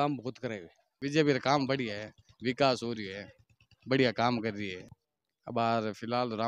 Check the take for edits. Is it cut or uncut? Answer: cut